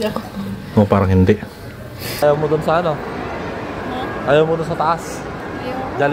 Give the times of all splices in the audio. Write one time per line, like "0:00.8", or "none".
0:02.1